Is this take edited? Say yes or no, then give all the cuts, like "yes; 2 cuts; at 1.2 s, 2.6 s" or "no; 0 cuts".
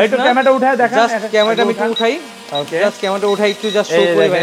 no; 0 cuts